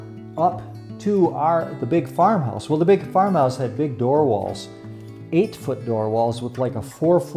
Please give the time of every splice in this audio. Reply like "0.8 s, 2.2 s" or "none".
none